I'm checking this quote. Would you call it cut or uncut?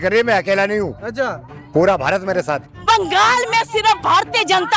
cut